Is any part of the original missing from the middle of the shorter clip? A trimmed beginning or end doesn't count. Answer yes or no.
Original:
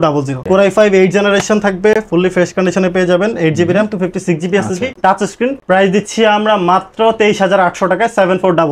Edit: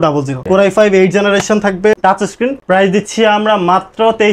yes